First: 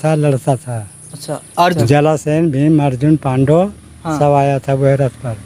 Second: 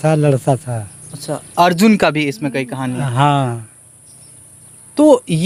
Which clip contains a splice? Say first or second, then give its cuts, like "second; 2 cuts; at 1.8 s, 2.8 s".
first; 1 cut; at 1.8 s